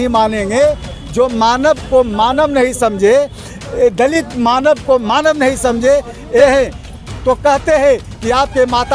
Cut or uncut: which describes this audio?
cut